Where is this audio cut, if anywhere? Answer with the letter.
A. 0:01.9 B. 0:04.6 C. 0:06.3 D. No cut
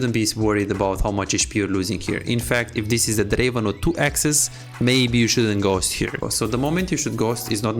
C